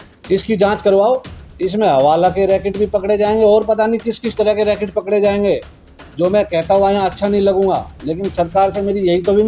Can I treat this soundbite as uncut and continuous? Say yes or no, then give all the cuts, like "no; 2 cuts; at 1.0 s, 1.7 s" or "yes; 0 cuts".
yes; 0 cuts